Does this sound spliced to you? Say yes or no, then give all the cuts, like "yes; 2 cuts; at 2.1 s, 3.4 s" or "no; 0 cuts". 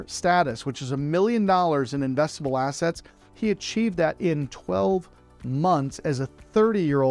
no; 0 cuts